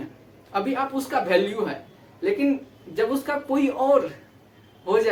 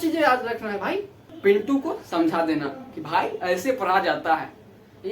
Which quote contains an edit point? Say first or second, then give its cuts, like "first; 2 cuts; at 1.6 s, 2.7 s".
second; 1 cut; at 1.2 s